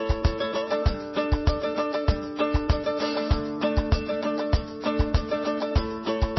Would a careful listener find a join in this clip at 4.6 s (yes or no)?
no